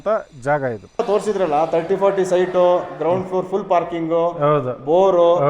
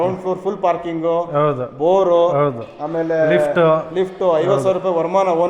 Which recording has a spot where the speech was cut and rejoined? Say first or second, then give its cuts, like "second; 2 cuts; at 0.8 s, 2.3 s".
first; 1 cut; at 1.0 s